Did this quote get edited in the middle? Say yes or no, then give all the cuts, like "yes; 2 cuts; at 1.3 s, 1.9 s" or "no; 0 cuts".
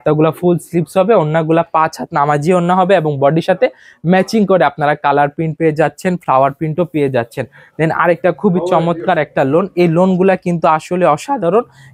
no; 0 cuts